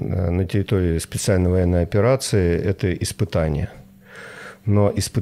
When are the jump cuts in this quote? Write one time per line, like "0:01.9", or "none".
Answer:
none